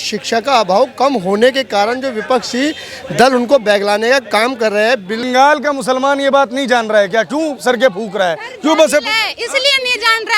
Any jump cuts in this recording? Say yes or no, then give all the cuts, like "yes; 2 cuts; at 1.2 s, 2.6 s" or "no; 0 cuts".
yes; 1 cut; at 5.2 s